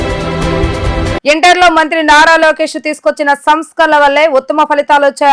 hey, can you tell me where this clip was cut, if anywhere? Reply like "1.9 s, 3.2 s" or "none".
none